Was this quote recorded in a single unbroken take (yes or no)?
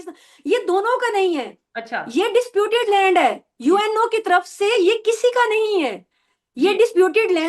yes